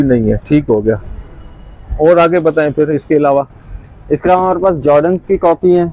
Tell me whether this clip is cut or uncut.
uncut